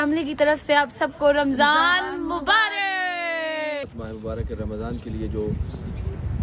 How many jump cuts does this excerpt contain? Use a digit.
1